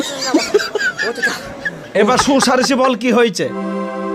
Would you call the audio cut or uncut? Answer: uncut